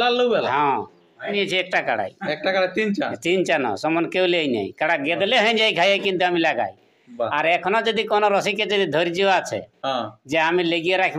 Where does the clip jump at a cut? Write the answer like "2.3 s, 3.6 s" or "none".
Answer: 1.3 s